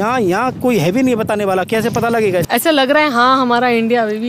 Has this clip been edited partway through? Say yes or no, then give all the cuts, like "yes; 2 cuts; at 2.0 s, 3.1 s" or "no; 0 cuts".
yes; 1 cut; at 2.5 s